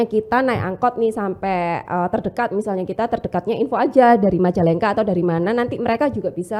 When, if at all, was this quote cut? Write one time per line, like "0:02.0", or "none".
none